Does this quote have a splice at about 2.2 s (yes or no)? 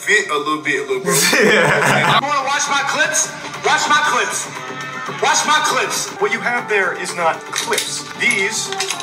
yes